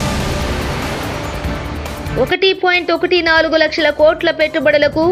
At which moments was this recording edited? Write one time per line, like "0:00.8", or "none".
none